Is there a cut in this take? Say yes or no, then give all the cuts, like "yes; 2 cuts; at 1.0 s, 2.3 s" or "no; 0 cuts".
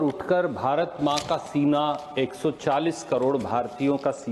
no; 0 cuts